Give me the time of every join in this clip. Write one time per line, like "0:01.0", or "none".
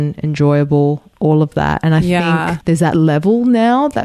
0:01.1
0:02.6